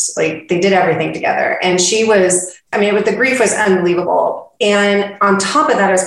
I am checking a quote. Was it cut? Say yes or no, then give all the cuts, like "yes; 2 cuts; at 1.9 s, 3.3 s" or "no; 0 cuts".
yes; 1 cut; at 2.7 s